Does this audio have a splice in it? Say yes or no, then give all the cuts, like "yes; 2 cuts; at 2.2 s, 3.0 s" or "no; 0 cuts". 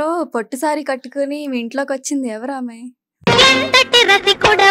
no; 0 cuts